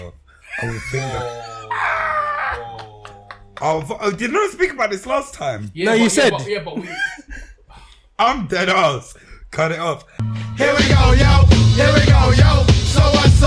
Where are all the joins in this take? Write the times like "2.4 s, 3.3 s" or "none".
10.1 s